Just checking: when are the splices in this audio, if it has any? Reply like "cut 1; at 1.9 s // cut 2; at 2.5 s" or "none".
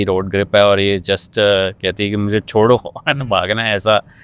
none